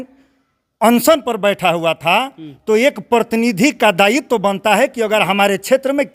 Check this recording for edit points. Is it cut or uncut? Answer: uncut